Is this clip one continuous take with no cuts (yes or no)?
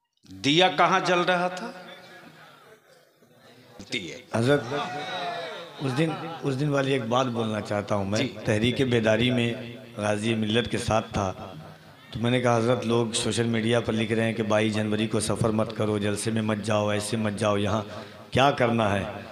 no